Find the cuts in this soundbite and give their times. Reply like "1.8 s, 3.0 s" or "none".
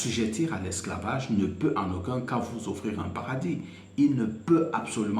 none